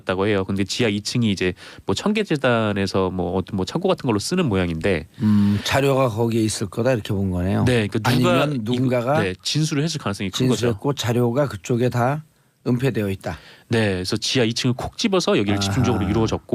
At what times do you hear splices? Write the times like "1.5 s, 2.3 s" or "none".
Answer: 13.3 s